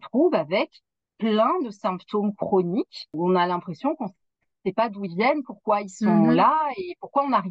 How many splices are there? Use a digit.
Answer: 1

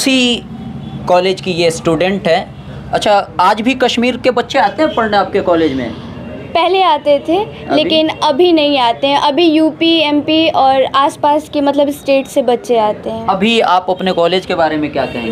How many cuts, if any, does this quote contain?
0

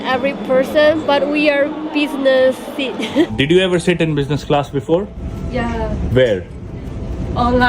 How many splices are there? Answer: 2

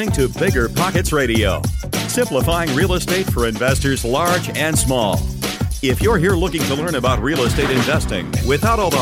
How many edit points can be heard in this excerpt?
0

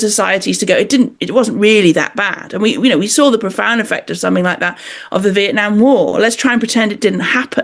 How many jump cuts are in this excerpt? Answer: 0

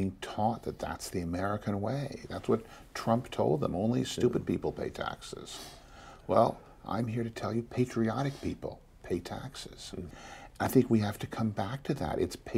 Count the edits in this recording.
1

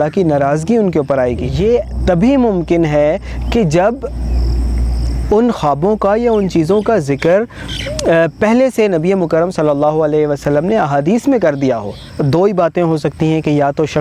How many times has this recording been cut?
2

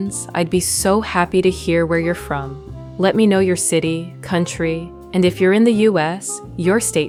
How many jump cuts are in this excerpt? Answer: 0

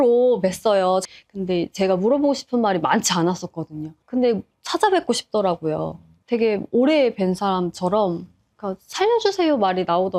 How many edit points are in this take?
0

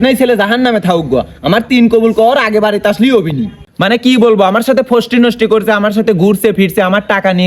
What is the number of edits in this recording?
1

